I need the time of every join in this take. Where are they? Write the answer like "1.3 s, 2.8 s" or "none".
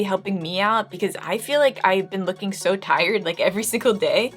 none